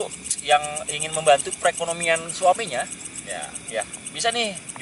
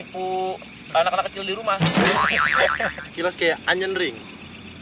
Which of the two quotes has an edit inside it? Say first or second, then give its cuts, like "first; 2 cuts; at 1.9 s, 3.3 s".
second; 1 cut; at 3.0 s